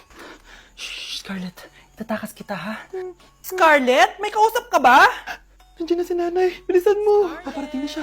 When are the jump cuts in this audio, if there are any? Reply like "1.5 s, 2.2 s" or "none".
3.6 s